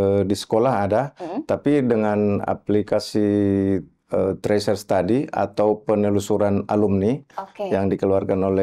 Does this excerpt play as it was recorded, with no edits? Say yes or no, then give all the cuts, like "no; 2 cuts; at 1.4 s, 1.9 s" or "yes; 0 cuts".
yes; 0 cuts